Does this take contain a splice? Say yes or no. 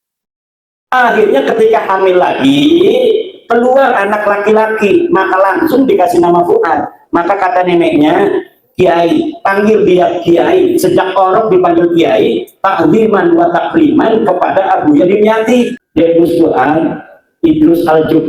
yes